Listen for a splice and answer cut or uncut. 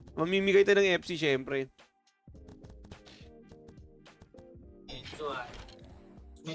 cut